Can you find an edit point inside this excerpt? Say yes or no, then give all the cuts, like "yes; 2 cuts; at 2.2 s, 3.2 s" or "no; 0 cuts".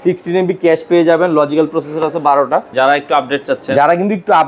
yes; 1 cut; at 2.7 s